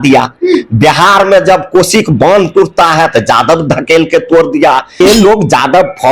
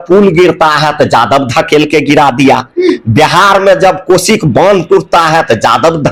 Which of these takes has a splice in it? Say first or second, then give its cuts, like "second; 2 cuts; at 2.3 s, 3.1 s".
first; 1 cut; at 5.0 s